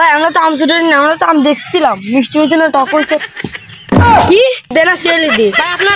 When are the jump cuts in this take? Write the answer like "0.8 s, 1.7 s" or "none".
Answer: 4.7 s